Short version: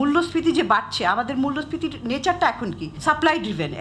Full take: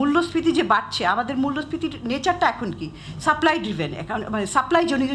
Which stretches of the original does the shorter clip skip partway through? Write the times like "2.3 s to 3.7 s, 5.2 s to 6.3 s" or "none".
2.9 s to 3.1 s